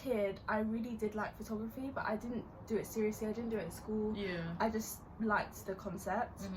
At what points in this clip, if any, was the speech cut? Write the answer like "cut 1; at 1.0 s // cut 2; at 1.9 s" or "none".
none